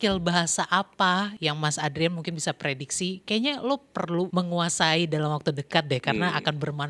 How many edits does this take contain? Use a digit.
2